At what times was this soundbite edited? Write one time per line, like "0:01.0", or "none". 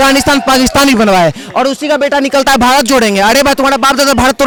none